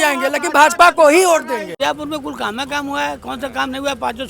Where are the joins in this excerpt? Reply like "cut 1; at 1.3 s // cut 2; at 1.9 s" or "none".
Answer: cut 1; at 1.7 s